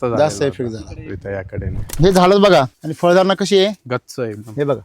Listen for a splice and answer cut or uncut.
cut